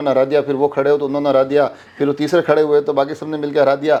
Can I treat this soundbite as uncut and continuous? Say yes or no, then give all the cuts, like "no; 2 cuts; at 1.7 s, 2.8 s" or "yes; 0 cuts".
yes; 0 cuts